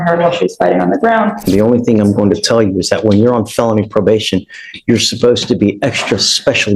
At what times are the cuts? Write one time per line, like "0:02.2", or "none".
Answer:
0:01.5